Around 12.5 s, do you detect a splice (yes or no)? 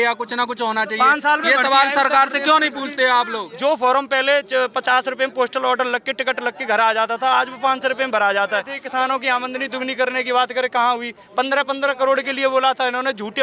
no